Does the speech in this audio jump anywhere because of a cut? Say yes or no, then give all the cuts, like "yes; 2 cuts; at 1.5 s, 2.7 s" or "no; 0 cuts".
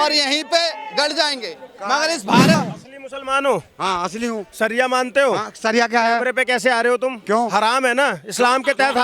yes; 1 cut; at 2.6 s